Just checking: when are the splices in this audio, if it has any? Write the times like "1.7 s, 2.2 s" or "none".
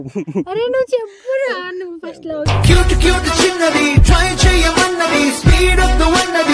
none